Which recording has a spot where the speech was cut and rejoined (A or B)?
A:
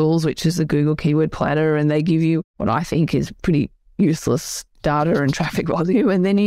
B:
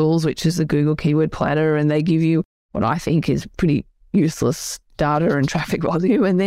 A